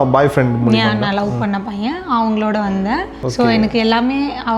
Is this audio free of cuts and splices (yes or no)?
no